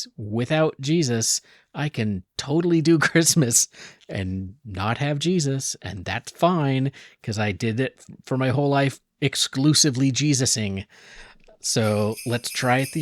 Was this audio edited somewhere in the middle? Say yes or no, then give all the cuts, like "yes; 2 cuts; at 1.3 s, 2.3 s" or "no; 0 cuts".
no; 0 cuts